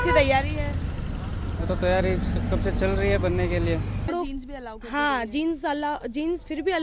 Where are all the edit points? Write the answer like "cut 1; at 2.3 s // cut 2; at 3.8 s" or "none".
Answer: cut 1; at 4.0 s

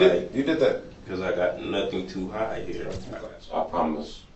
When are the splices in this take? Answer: cut 1; at 3.0 s

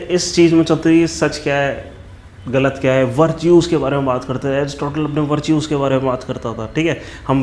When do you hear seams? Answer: none

